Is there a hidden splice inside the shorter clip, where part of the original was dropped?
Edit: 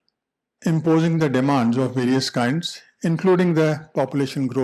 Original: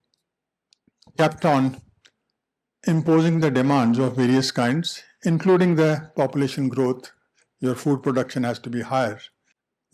no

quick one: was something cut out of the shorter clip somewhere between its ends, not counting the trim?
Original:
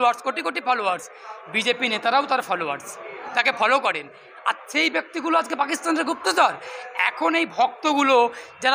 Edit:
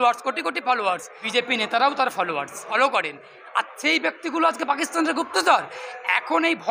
yes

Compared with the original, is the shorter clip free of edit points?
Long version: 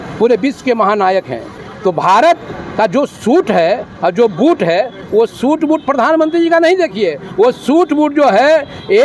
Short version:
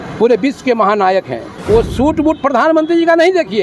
no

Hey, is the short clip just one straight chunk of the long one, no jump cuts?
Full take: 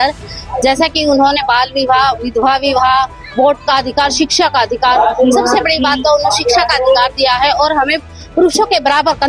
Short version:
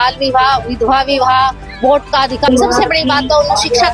no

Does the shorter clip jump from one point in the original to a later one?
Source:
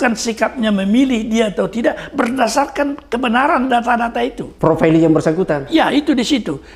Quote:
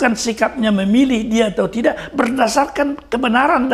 no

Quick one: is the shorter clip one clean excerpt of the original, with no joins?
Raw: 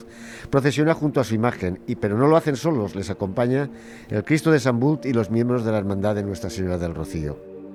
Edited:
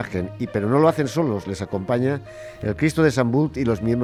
yes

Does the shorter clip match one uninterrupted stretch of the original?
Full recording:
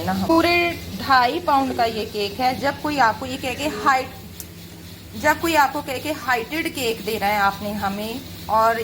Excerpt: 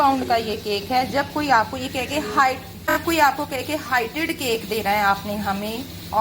no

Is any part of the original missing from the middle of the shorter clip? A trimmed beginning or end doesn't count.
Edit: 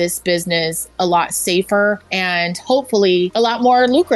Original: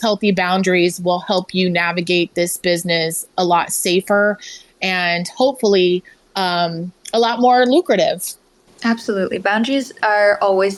yes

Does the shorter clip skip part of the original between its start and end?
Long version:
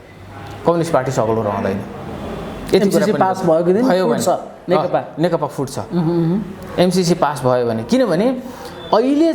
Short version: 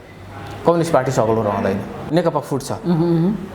yes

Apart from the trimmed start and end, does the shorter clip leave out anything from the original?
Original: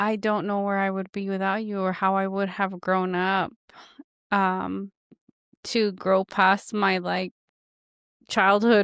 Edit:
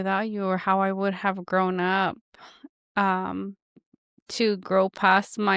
no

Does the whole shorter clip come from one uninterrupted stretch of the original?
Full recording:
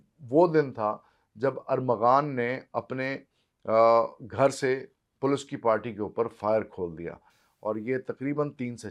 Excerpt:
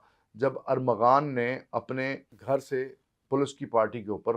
no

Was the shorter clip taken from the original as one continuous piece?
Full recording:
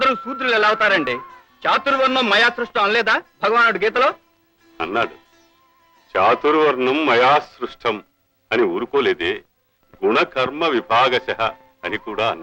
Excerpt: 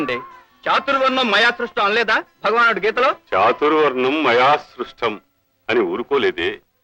no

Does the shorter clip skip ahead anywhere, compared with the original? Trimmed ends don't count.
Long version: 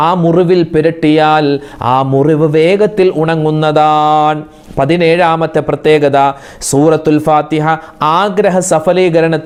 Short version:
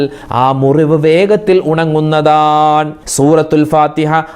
yes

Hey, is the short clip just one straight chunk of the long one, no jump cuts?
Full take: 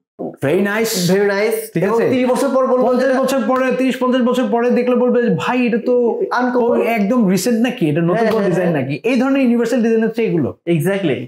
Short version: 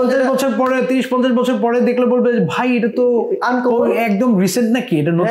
yes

